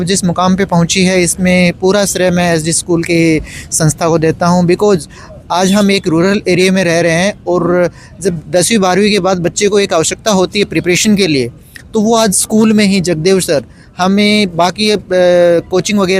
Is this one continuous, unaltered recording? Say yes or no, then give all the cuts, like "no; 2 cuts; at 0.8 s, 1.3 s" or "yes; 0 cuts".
yes; 0 cuts